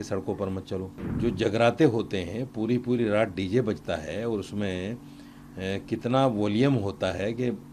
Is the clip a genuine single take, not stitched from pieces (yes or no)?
no